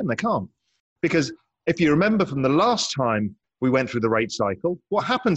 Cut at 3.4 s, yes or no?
yes